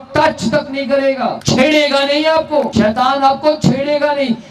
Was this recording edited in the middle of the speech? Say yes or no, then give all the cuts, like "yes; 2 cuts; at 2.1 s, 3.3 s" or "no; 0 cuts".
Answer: yes; 2 cuts; at 1.4 s, 2.7 s